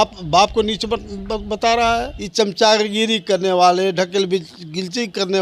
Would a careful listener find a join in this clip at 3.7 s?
no; 1 cut; at 2.2 s

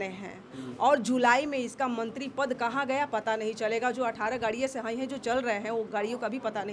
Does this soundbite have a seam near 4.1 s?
no; 0 cuts

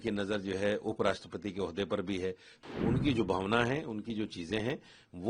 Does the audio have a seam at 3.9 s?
no; 1 cut; at 2.6 s

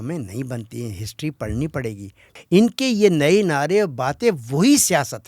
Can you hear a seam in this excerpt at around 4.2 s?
no; 1 cut; at 2.4 s

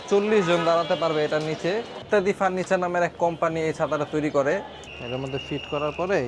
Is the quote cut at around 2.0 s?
yes; 2 cuts; at 2.0 s, 4.8 s

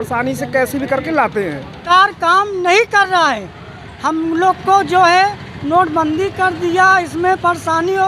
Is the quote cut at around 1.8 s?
yes; 1 cut; at 1.8 s

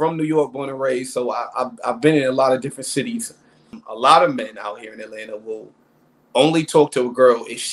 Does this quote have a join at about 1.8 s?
no; 1 cut; at 3.8 s

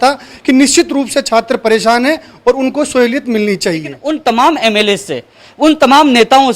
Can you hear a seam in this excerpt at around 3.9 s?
yes; 1 cut; at 3.9 s

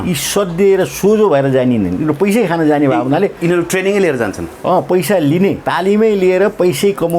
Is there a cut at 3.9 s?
no; 1 cut; at 5.6 s

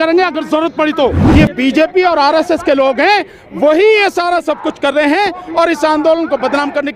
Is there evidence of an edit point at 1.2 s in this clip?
yes; 1 cut; at 1.2 s

